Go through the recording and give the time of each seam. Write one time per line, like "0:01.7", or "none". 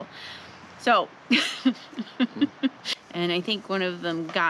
0:02.9